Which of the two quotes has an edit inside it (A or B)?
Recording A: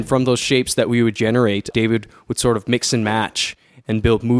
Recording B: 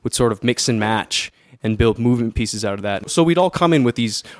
B